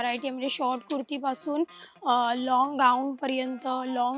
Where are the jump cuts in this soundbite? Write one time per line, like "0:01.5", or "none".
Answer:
none

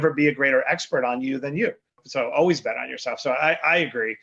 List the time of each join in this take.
0:02.0

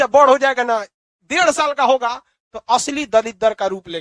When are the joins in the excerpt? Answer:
none

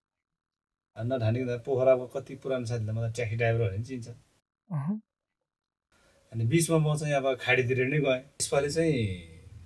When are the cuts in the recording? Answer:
0:08.3

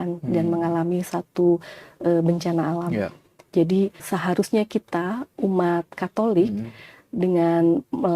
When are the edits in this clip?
0:04.0

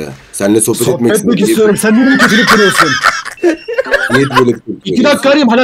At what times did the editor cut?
none

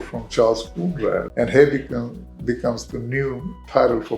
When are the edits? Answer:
0:01.3

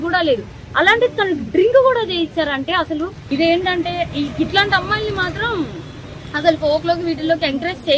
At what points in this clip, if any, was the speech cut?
0:03.2

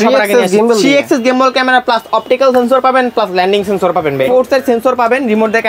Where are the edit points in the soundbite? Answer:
0:04.3

